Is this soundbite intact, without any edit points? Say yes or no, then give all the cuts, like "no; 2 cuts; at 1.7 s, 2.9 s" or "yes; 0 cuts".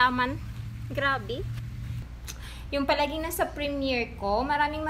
no; 1 cut; at 2.0 s